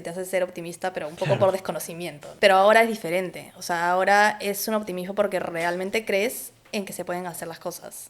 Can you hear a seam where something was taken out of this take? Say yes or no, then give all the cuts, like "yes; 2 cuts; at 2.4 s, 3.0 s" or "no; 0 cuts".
yes; 1 cut; at 2.2 s